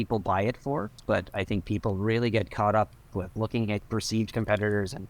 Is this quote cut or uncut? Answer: cut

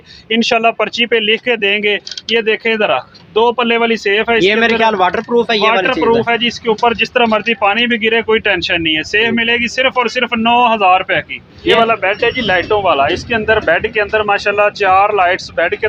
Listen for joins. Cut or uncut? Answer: cut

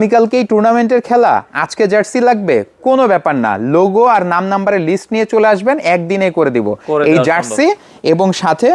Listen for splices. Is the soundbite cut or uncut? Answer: uncut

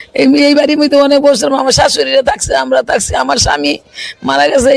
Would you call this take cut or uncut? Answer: uncut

